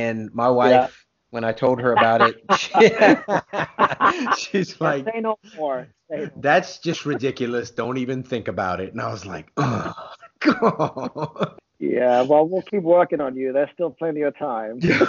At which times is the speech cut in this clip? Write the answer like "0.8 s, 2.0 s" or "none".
11.6 s